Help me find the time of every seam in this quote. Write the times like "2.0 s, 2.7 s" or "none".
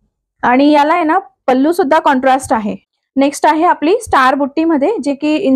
2.8 s